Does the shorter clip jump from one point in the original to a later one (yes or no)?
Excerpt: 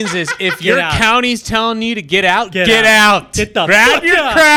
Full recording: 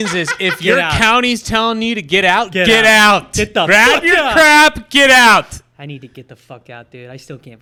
no